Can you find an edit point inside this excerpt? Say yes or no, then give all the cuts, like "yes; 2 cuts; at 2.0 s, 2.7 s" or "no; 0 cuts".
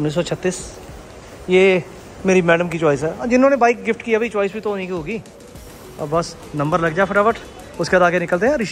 no; 0 cuts